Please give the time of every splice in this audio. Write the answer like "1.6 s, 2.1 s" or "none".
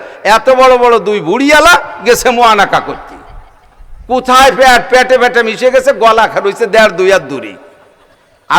none

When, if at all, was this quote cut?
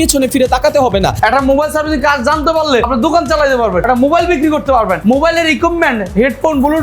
1.2 s, 2.9 s, 3.9 s

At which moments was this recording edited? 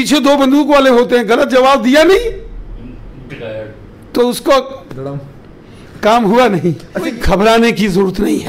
7.1 s

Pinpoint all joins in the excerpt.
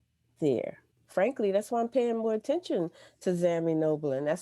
1.0 s

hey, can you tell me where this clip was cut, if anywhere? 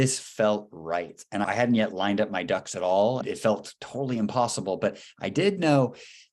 1.4 s, 3.2 s

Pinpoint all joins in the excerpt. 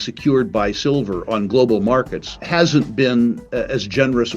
2.4 s

